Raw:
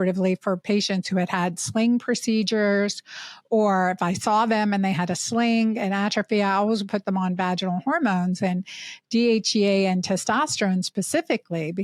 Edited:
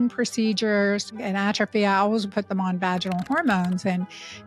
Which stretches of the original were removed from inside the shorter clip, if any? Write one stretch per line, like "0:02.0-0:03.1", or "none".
0:03.1-0:05.8